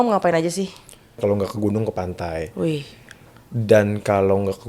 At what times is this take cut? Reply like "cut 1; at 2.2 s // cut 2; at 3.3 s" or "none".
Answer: cut 1; at 1.2 s